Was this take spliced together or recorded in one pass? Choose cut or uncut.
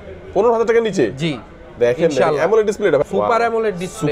cut